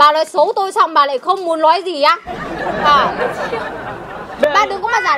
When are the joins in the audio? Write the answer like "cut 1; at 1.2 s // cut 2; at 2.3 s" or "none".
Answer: none